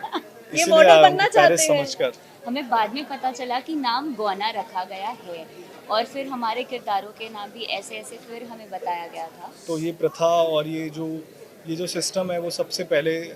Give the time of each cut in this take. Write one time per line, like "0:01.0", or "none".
0:02.3
0:09.5